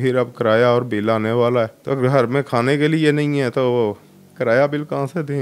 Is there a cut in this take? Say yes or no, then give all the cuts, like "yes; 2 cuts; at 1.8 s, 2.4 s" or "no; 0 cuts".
no; 0 cuts